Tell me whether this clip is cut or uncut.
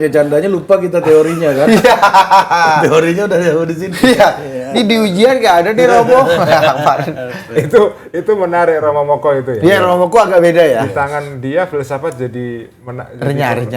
uncut